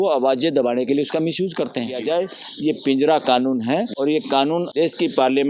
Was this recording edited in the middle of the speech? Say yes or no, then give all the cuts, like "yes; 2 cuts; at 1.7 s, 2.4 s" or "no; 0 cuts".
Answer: yes; 3 cuts; at 2.0 s, 3.9 s, 4.7 s